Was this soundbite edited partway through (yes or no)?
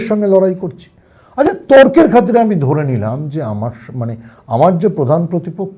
no